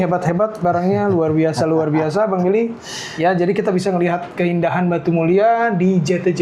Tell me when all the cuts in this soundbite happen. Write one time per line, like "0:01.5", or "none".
none